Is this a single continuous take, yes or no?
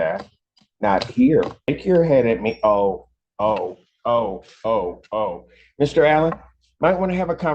no